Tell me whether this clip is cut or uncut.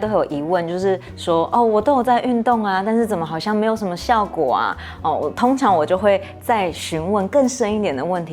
uncut